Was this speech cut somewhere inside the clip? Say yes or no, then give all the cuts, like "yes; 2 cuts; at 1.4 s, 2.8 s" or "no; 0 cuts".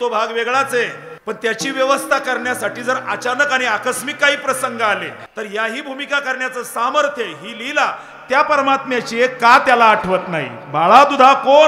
yes; 2 cuts; at 1.1 s, 5.2 s